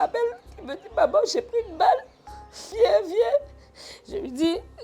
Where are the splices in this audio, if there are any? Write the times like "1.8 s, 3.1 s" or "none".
2.7 s